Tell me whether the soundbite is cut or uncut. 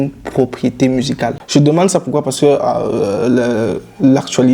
cut